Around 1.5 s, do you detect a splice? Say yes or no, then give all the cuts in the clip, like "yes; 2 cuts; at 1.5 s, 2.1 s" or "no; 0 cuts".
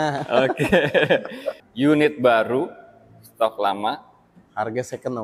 yes; 1 cut; at 1.5 s